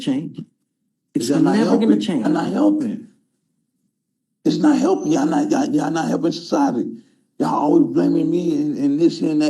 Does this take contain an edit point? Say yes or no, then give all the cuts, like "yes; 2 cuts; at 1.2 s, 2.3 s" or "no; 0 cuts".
no; 0 cuts